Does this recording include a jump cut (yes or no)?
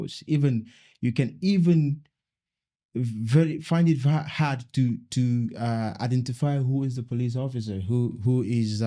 no